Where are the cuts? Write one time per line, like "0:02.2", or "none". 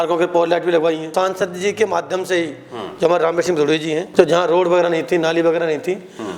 0:01.1
0:04.1